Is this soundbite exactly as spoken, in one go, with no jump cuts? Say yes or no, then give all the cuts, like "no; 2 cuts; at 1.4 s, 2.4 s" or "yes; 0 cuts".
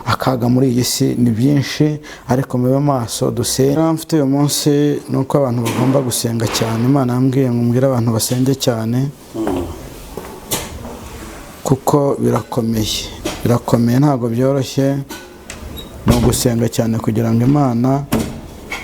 no; 1 cut; at 3.8 s